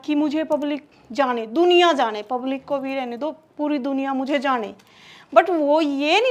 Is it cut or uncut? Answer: uncut